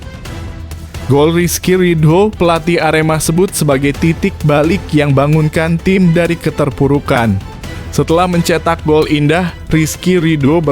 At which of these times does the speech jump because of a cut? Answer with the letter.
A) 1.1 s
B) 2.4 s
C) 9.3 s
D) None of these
A